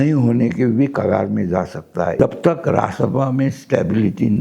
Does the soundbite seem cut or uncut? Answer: cut